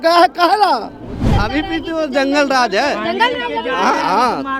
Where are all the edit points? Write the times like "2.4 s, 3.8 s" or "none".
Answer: 1.2 s